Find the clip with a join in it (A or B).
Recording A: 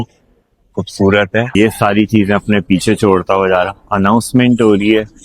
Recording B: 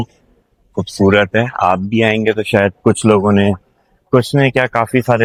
A